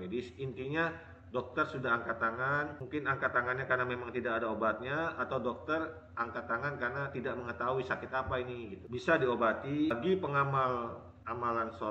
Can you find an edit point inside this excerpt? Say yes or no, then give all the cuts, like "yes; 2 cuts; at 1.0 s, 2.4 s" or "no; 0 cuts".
yes; 1 cut; at 9.9 s